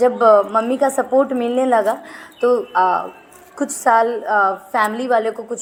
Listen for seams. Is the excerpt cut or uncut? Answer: uncut